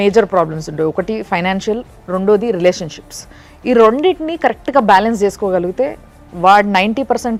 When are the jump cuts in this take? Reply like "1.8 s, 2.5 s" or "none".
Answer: none

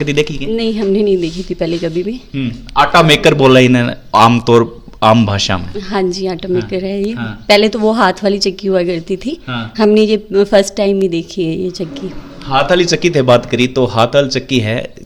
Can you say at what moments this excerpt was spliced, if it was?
none

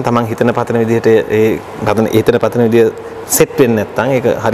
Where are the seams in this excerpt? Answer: none

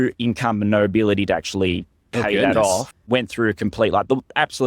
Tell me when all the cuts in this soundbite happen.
2.9 s

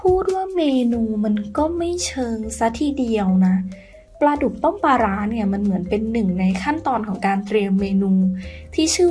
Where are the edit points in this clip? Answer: 4.0 s

